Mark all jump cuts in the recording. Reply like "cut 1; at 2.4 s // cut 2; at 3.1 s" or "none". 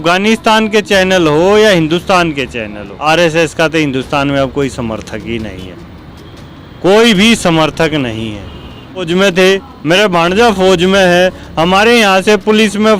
cut 1; at 2.9 s // cut 2; at 9.1 s